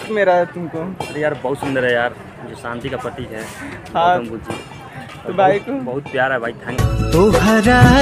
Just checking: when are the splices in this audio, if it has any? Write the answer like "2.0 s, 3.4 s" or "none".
none